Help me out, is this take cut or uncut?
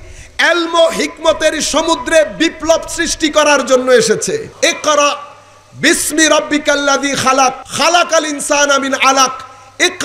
cut